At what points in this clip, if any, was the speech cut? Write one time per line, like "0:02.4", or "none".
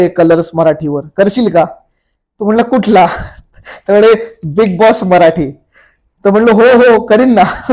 none